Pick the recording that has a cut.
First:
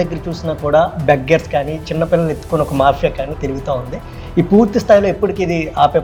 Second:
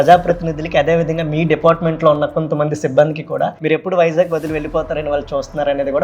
second; 1 cut; at 3.6 s

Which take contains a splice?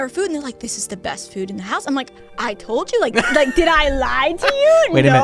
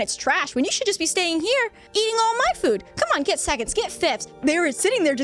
second; 2 cuts; at 1.8 s, 4.3 s

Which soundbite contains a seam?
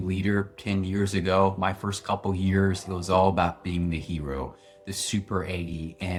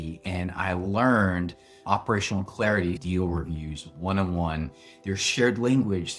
second; 2 cuts; at 1.8 s, 3.0 s

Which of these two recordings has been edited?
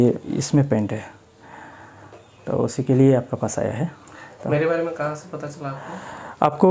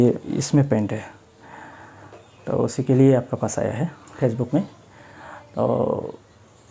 second; 1 cut; at 4.0 s

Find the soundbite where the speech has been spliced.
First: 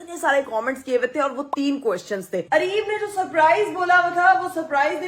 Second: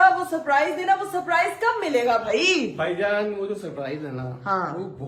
first; 1 cut; at 2.4 s

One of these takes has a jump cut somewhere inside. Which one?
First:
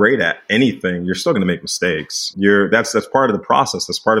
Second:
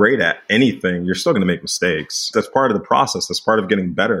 second; 1 cut; at 2.3 s

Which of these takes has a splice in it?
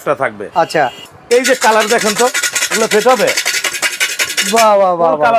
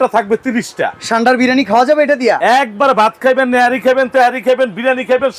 first; 1 cut; at 1.0 s

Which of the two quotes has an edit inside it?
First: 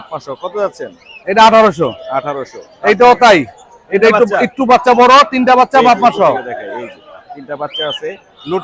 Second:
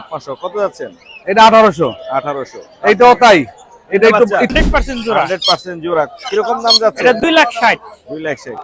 second; 1 cut; at 4.5 s

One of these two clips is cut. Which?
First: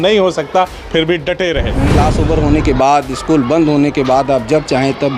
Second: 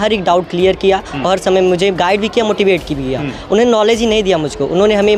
first; 1 cut; at 1.9 s

